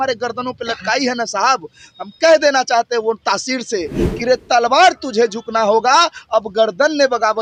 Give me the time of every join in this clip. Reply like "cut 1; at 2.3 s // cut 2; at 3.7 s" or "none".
none